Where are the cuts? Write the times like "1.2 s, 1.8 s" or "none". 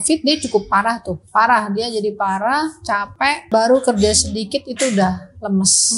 1.2 s, 3.4 s